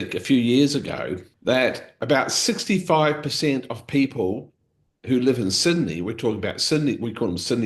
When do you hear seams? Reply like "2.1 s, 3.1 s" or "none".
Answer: 1.3 s, 1.9 s